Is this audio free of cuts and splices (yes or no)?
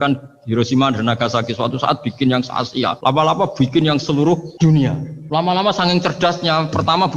no